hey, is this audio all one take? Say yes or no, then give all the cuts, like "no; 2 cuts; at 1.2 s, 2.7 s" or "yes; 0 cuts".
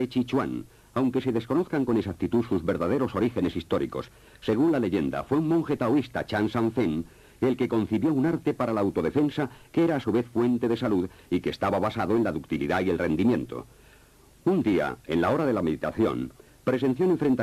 yes; 0 cuts